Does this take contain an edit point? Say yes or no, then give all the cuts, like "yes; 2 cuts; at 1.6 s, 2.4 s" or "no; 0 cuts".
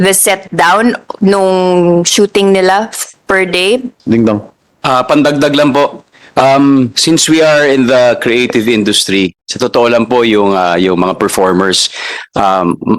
yes; 1 cut; at 3.9 s